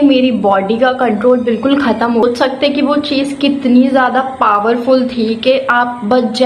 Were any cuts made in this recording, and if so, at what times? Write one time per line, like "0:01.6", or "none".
0:02.2